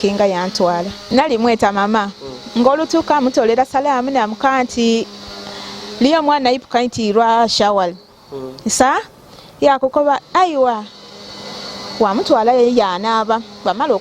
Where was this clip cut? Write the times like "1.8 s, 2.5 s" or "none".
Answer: 1.0 s